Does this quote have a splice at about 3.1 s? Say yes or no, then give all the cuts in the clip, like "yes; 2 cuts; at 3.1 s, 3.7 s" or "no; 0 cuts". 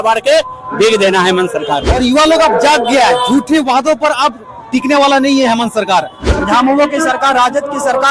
no; 2 cuts; at 1.9 s, 6.3 s